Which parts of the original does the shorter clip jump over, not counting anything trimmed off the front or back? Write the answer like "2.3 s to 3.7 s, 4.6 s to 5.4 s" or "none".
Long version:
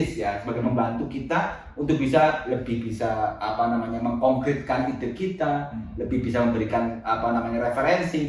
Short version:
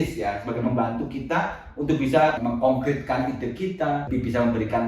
2.4 s to 4.0 s, 5.7 s to 6.1 s